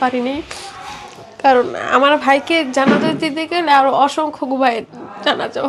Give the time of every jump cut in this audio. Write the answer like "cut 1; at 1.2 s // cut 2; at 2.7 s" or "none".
none